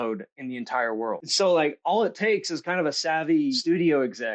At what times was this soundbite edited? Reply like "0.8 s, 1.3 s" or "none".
1.3 s, 3.6 s